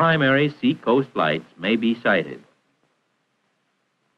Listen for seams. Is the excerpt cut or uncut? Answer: uncut